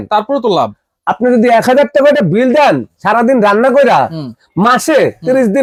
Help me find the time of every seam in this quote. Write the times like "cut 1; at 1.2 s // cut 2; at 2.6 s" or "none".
none